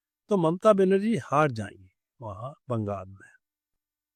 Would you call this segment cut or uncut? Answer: uncut